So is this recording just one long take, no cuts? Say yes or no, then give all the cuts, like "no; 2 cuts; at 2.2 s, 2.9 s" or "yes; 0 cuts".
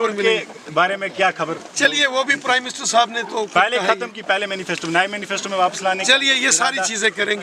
yes; 0 cuts